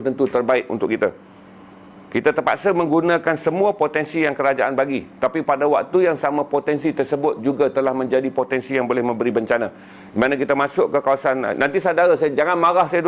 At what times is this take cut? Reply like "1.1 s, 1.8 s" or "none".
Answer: none